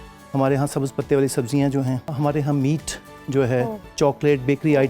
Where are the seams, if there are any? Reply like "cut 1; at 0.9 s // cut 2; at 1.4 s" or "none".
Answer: cut 1; at 2.1 s // cut 2; at 3.9 s